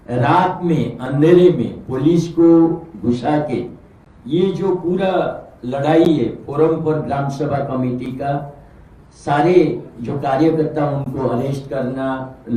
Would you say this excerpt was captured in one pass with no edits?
yes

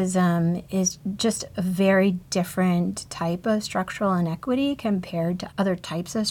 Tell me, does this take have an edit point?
yes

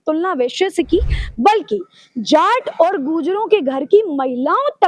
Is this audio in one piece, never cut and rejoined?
yes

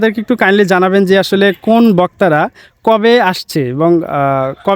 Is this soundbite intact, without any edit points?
yes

